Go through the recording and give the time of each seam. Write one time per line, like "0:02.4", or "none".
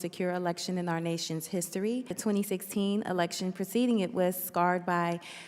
0:02.1